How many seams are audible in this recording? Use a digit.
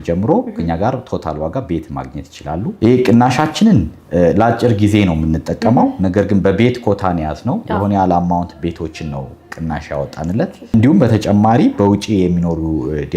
2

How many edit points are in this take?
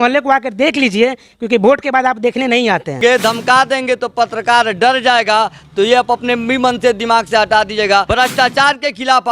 2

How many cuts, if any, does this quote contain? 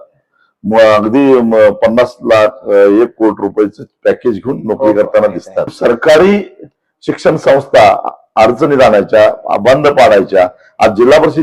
1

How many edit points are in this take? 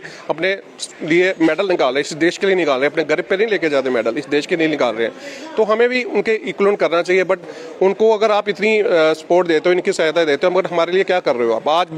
0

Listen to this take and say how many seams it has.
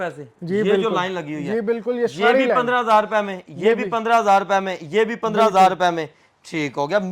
0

